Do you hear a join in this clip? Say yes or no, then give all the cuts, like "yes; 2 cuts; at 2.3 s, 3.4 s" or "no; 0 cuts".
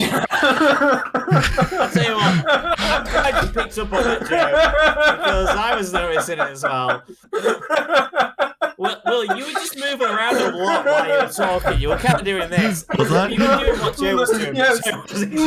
no; 0 cuts